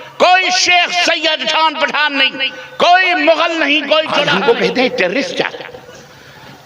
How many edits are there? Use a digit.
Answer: 1